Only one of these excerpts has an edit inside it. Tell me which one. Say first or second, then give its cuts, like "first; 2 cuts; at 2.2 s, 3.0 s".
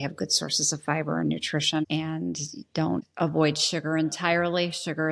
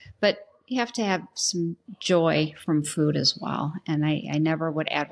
first; 2 cuts; at 1.8 s, 3.1 s